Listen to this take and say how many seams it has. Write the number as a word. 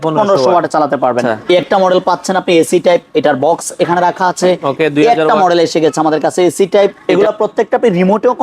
two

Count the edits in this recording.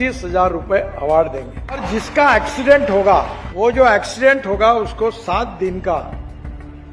two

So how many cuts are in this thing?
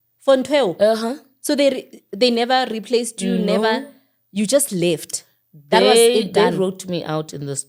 zero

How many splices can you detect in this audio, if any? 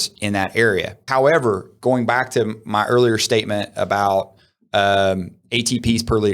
one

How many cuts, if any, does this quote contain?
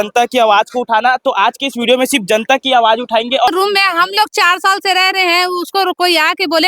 one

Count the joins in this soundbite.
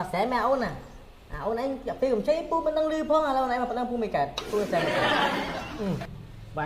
two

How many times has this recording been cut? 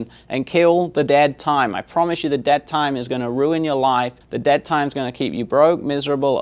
one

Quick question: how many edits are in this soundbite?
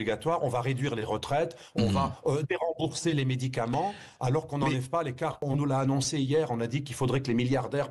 one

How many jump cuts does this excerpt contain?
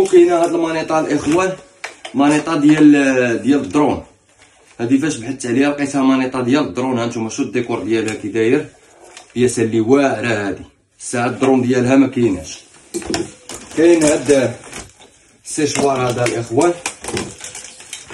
zero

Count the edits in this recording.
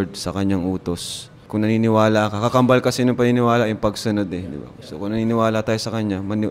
one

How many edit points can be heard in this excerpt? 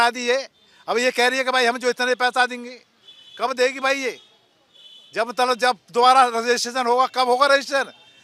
zero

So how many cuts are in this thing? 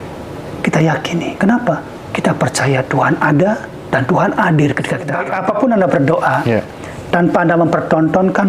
one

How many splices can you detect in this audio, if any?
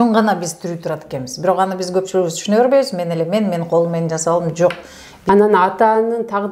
one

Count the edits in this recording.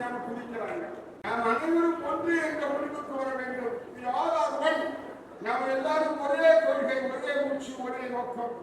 one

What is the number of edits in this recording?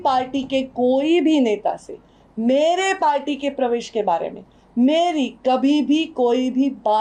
zero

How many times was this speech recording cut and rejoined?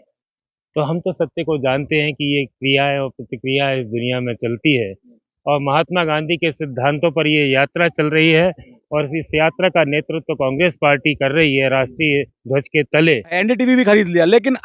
one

